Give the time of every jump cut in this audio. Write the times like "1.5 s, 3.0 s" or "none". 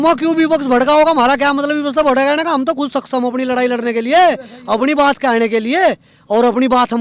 none